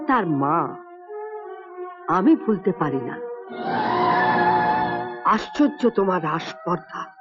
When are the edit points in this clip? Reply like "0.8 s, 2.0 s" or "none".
none